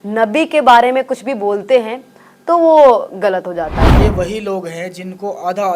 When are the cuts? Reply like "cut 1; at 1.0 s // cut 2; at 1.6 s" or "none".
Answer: cut 1; at 3.9 s